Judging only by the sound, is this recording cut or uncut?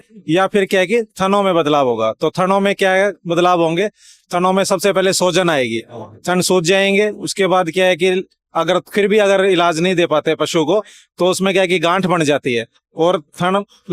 uncut